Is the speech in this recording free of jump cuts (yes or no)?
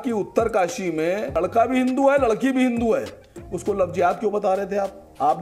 yes